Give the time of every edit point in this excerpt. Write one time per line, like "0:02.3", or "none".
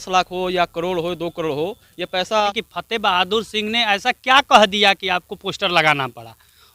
0:02.5